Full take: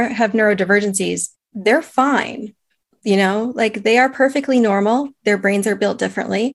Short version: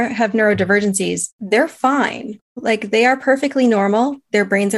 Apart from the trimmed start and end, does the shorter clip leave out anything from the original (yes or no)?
yes